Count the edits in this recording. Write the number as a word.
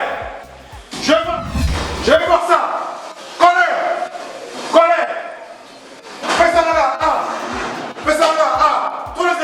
one